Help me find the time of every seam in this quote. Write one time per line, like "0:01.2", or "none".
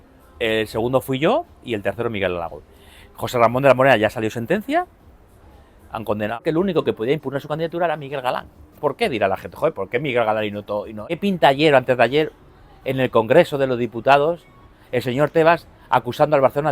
0:06.4
0:11.0